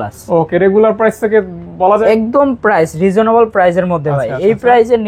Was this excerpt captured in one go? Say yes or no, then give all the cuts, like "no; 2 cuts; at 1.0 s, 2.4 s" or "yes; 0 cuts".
no; 1 cut; at 1.9 s